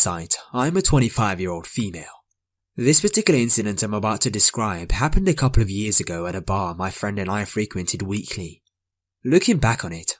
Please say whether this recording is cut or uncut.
uncut